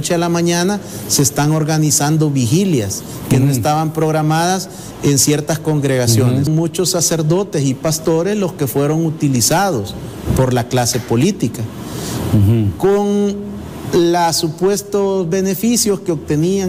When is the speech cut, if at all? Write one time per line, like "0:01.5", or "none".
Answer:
0:06.5